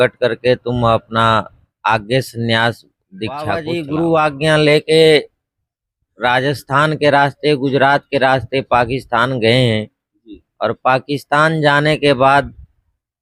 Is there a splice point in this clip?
yes; 1 cut; at 3.6 s

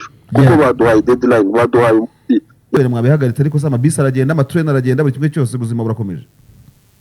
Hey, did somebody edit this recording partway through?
yes; 1 cut; at 2.8 s

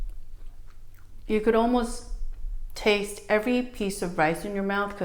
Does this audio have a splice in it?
no; 0 cuts

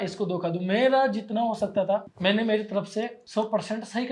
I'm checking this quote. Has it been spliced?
yes; 2 cuts; at 2.1 s, 3.2 s

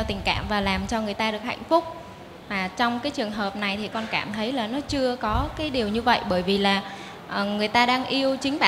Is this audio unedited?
yes; 0 cuts

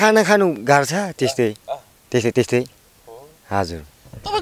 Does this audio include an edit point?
no; 0 cuts

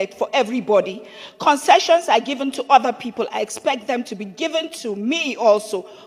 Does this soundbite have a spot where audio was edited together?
no; 0 cuts

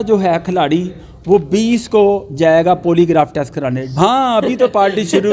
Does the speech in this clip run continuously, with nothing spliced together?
no; 1 cut; at 3.8 s

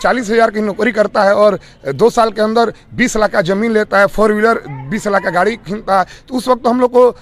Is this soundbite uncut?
yes; 0 cuts

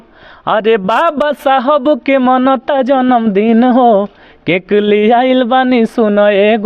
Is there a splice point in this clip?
no; 0 cuts

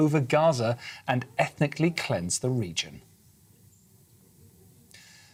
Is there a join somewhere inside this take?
no; 0 cuts

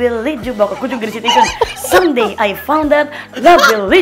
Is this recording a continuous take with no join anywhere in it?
yes; 0 cuts

